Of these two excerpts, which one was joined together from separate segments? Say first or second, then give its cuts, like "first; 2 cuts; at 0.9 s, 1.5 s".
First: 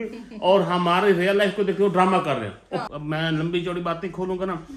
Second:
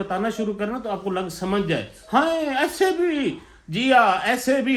first; 1 cut; at 2.9 s